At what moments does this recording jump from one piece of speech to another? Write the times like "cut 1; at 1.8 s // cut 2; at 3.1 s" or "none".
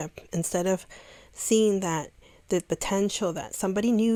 none

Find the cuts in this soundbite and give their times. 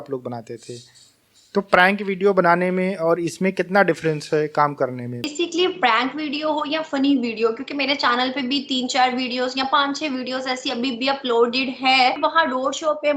cut 1; at 5.3 s // cut 2; at 12.2 s

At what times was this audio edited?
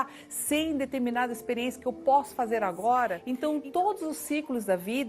cut 1; at 3.2 s

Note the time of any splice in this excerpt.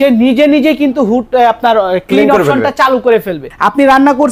cut 1; at 3.4 s

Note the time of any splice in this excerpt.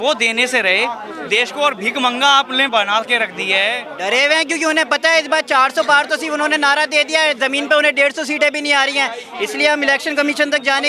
cut 1; at 3.9 s

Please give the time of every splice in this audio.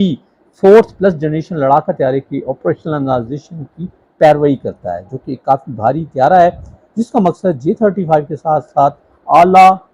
none

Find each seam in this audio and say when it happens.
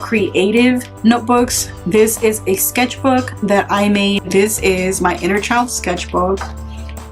cut 1; at 4.2 s

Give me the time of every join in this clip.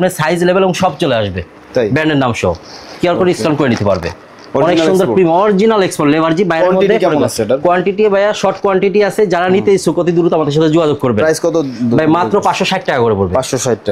none

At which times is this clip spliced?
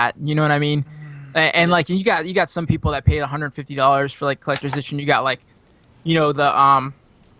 cut 1; at 1.9 s

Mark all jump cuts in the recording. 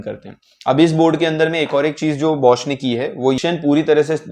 cut 1; at 3.4 s

